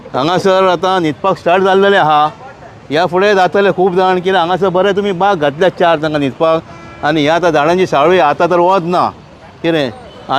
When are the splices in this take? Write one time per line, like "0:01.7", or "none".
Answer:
none